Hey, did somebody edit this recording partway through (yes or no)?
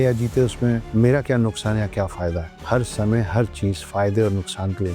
yes